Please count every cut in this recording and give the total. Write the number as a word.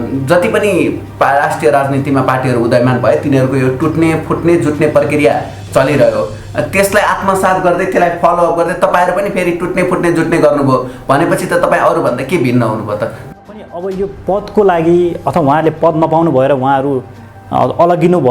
one